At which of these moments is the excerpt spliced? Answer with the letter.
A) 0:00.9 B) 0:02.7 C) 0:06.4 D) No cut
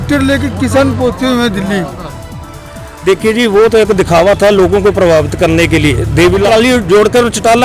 C